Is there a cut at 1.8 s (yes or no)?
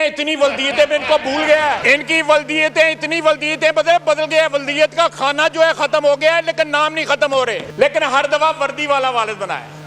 yes